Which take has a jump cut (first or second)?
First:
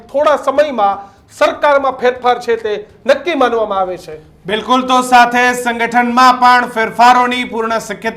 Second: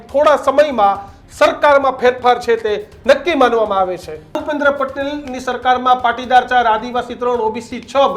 second